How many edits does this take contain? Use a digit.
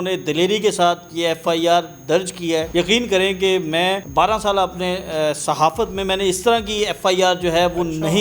2